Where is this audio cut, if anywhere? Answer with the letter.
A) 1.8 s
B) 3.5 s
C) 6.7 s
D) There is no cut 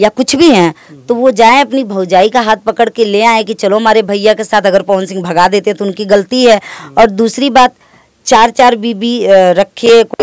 D